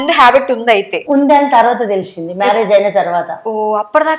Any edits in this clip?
yes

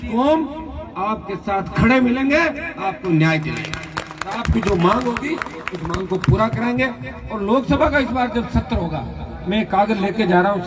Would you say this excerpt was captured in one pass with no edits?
yes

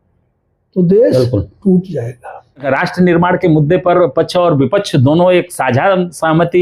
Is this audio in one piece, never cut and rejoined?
no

